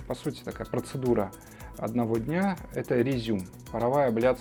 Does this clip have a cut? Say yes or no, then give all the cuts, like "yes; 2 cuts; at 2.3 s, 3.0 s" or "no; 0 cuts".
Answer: no; 0 cuts